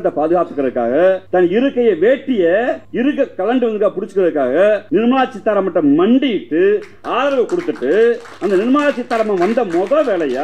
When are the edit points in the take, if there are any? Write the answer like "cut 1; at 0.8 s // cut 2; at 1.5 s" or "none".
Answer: cut 1; at 1.2 s // cut 2; at 2.8 s // cut 3; at 4.8 s